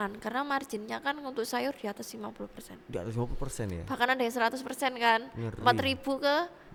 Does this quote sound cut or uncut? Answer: uncut